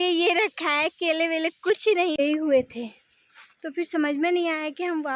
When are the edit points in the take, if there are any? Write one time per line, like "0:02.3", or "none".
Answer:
0:02.2